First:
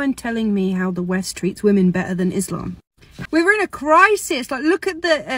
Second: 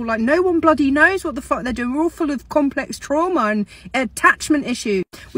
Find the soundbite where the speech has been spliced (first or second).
first